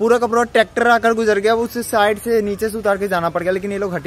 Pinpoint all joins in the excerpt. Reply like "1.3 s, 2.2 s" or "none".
none